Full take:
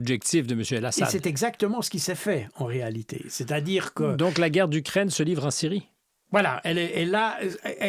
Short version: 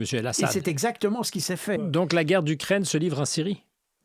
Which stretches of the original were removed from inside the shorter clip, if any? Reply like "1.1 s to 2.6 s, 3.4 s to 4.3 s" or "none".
2.4 s to 4.1 s